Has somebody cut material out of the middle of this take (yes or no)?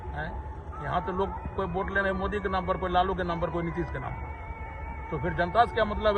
no